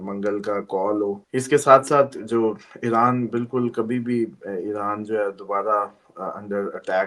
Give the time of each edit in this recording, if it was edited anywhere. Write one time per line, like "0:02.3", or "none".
0:01.2